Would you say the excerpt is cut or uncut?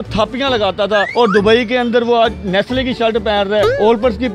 cut